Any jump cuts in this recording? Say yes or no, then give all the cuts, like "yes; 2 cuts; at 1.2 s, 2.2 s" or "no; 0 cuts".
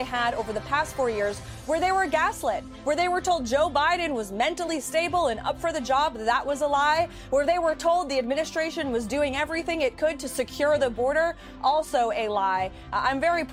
no; 0 cuts